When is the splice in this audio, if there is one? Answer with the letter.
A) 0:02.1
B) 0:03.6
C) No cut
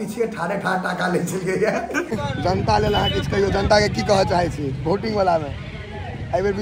A